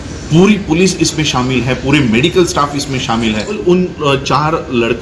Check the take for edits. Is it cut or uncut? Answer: cut